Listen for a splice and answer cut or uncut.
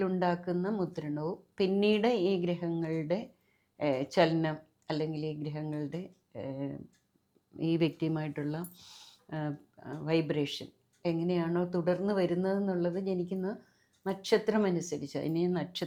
uncut